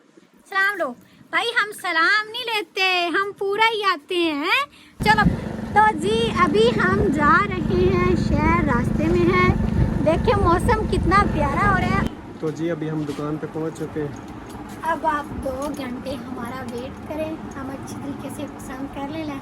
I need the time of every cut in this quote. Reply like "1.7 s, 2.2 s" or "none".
5.0 s, 12.1 s